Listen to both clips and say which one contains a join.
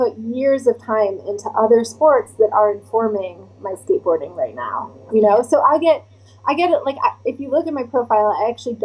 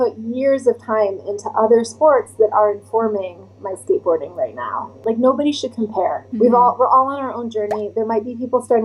second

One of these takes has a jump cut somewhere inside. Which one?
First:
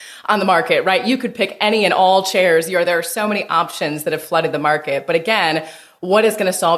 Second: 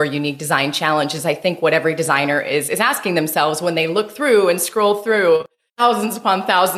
second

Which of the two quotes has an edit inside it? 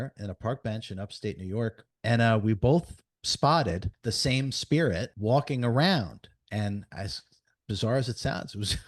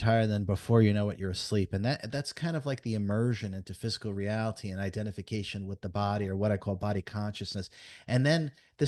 first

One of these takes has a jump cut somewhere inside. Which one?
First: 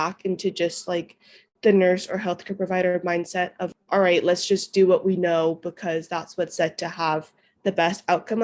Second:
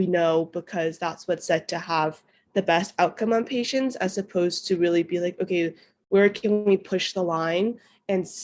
first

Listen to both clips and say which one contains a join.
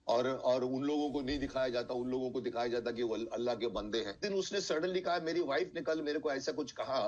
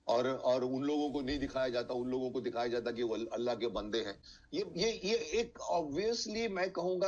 first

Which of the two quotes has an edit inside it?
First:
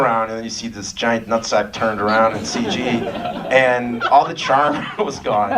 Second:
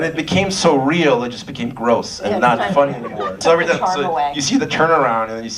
second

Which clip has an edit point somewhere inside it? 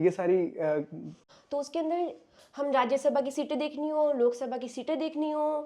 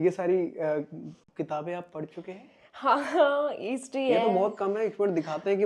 first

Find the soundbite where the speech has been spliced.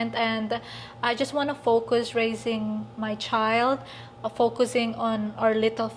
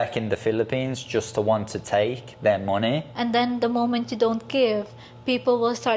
second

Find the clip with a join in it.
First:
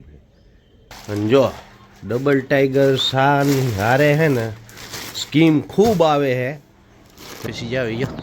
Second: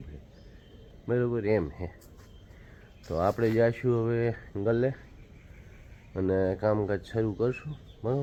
first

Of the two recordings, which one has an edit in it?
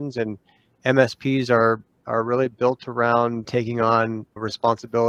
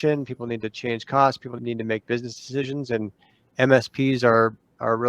second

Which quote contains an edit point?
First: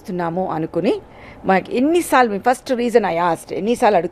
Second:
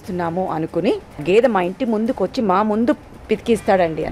second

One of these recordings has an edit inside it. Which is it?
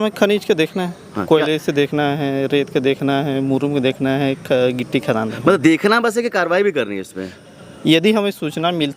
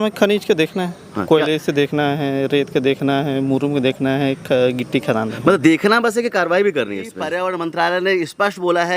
second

